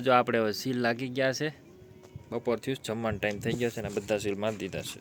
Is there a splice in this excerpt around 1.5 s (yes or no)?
no